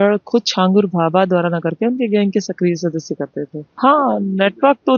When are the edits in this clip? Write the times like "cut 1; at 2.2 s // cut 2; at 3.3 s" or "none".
none